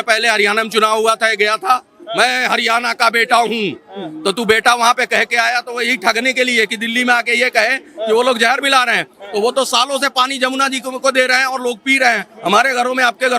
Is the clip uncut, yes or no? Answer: yes